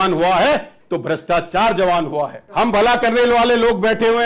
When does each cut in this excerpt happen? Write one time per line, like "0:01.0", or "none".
0:02.4